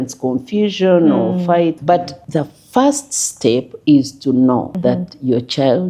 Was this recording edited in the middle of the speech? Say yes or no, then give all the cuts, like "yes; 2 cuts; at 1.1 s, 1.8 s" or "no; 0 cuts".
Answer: yes; 2 cuts; at 1.9 s, 4.7 s